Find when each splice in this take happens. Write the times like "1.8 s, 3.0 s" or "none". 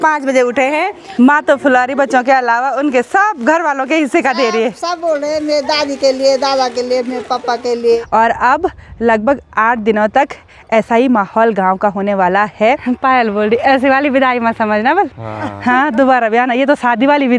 1.1 s, 8.0 s, 12.8 s